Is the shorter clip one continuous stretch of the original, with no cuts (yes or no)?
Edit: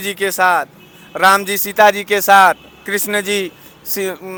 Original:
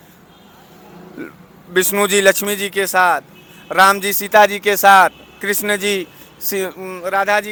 yes